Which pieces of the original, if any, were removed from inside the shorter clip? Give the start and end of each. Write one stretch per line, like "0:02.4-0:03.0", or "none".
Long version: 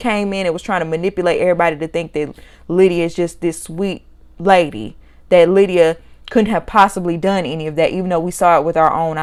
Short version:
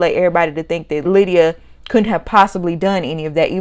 0:02.3-0:05.5